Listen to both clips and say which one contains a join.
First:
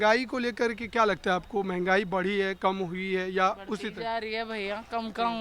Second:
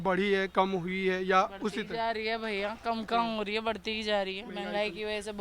second; 1 cut; at 4.5 s

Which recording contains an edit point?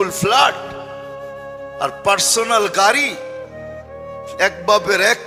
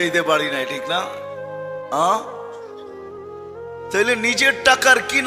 second; 2 cuts; at 2.4 s, 3.9 s

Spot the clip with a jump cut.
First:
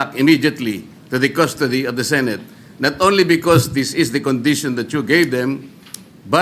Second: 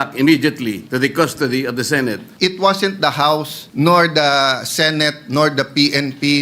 second; 3 cuts; at 0.8 s, 2.3 s, 3.6 s

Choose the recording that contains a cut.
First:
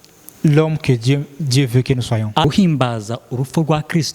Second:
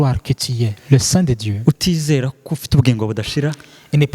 first; 1 cut; at 2.4 s

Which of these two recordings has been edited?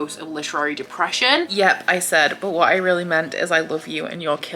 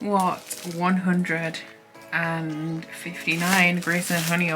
first; 1 cut; at 1.5 s

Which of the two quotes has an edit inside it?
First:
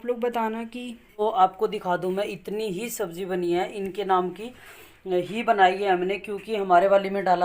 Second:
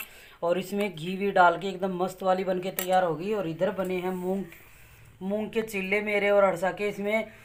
first; 1 cut; at 1.2 s

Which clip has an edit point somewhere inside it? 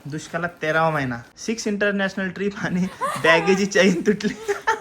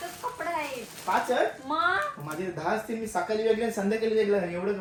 first; 1 cut; at 1.3 s

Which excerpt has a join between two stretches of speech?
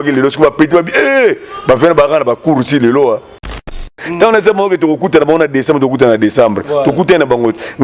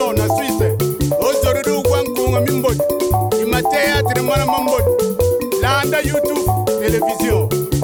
first; 1 cut; at 3.9 s

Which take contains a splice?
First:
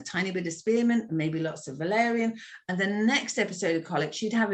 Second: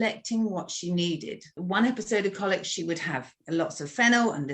second; 2 cuts; at 1.6 s, 3.3 s

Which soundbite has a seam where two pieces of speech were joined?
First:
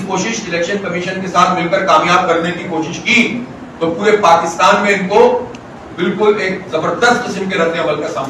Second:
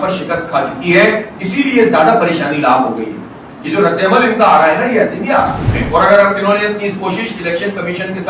second; 1 cut; at 5.7 s

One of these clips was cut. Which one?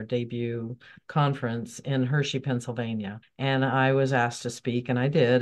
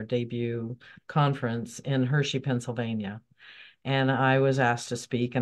first; 1 cut; at 3.2 s

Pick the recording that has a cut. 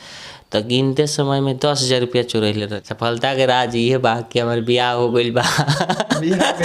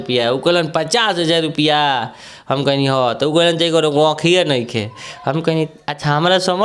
first; 1 cut; at 2.7 s

